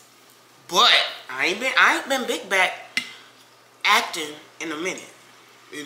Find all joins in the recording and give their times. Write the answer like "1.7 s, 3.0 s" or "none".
none